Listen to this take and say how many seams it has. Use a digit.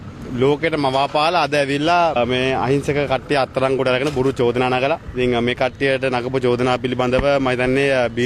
0